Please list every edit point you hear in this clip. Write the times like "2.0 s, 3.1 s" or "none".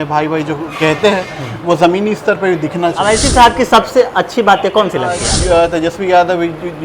3.0 s, 5.3 s